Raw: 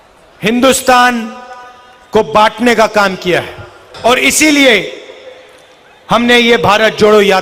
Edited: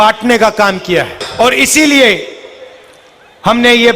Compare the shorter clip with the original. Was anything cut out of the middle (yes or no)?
yes